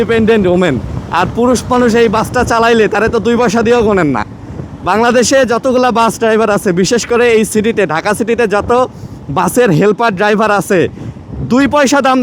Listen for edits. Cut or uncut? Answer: uncut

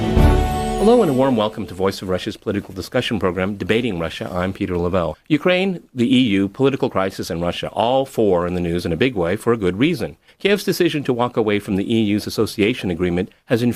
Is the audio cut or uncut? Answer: uncut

